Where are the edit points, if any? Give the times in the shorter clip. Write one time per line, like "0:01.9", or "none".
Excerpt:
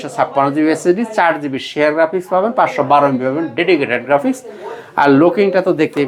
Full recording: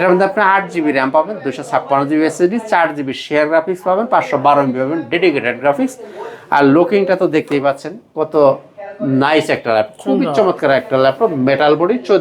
none